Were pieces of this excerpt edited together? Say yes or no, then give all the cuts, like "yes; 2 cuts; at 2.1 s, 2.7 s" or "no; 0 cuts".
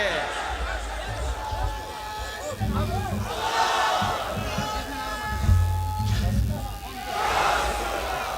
no; 0 cuts